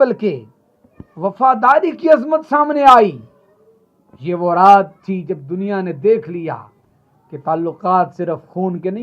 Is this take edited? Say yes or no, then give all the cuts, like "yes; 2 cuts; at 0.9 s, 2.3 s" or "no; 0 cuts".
no; 0 cuts